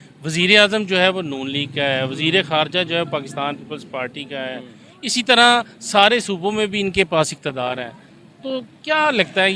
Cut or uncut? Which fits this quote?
uncut